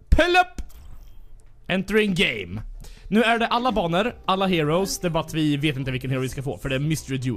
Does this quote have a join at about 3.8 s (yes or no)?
yes